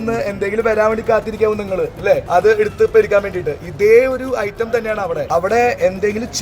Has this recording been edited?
yes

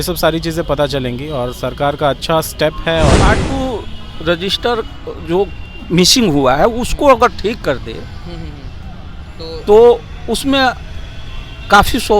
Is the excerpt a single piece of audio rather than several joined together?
no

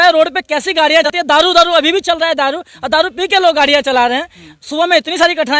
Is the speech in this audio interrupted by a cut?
yes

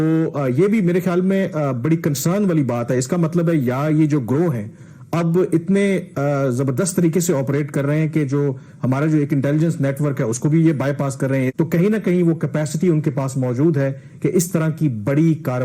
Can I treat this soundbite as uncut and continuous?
no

